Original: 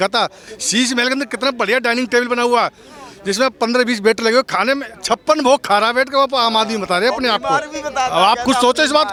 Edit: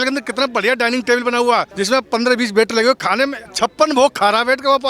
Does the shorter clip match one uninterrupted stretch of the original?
no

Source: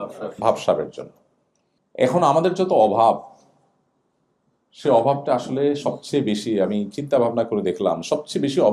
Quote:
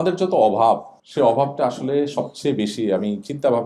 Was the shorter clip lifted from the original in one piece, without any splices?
no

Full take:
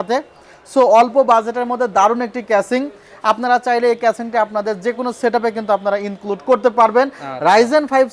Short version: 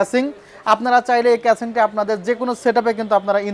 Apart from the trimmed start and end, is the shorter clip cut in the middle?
no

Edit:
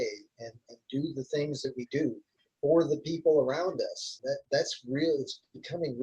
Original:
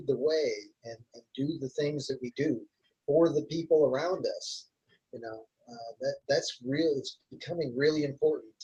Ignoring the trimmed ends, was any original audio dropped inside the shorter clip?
yes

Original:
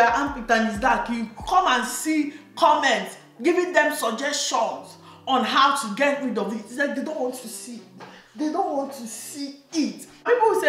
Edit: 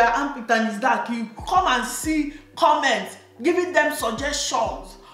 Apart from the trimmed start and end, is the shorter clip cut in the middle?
no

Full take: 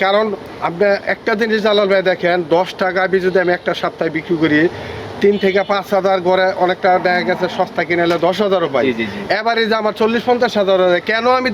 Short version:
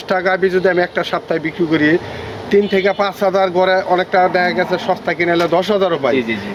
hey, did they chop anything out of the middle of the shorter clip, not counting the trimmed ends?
no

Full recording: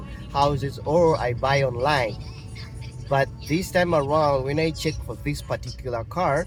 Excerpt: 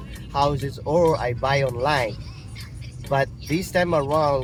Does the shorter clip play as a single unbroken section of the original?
yes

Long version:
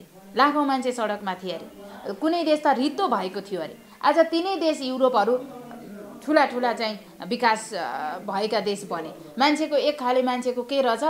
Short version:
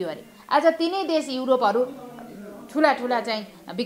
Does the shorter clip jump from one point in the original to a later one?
no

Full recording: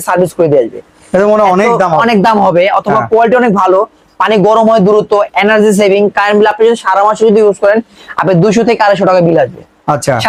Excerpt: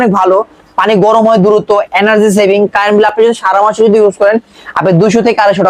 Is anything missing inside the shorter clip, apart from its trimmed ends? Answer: no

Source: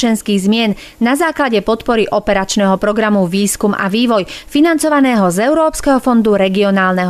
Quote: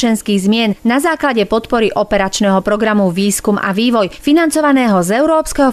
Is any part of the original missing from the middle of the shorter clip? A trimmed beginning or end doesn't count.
yes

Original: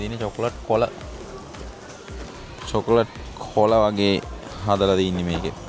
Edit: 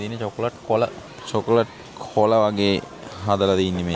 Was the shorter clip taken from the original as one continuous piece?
no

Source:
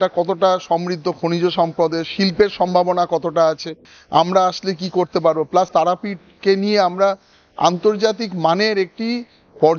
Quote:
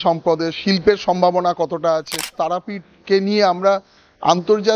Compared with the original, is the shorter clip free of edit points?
no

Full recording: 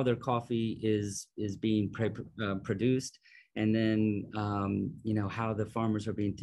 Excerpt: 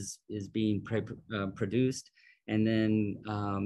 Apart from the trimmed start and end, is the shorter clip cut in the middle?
no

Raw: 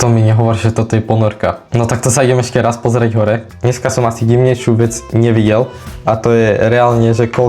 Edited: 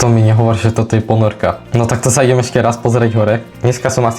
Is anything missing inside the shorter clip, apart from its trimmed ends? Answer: no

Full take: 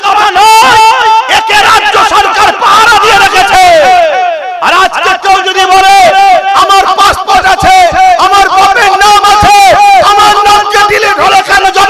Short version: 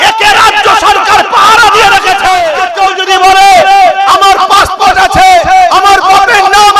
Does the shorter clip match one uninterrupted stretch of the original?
no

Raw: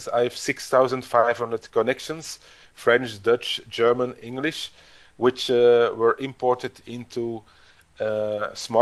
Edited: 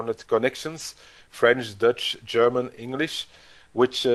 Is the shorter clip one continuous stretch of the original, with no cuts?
yes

